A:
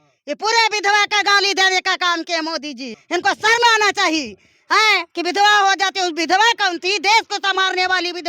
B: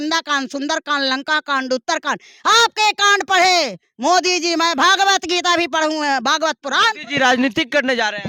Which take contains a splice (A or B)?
A